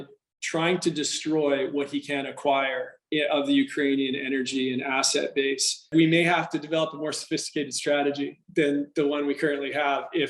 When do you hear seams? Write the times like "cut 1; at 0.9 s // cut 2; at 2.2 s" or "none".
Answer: cut 1; at 5.9 s

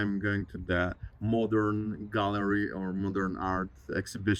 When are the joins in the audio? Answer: none

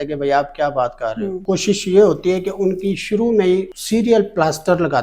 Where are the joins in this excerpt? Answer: cut 1; at 1.4 s // cut 2; at 3.8 s

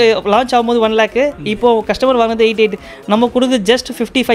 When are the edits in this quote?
none

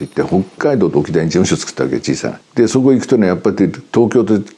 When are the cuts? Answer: cut 1; at 2.3 s

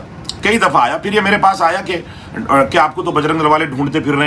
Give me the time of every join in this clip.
none

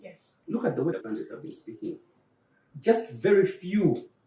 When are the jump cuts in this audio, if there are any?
cut 1; at 0.9 s

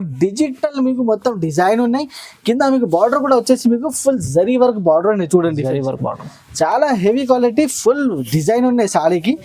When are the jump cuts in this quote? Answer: none

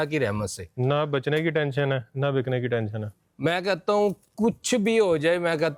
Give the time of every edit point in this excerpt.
none

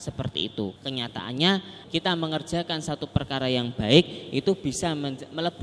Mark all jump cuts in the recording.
cut 1; at 0.7 s // cut 2; at 1.8 s

